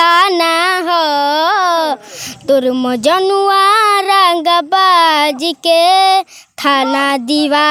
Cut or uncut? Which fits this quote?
uncut